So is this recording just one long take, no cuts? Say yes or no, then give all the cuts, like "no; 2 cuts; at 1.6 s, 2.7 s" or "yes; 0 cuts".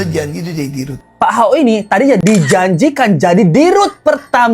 no; 1 cut; at 1.1 s